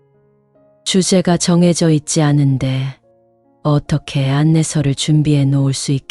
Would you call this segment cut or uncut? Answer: uncut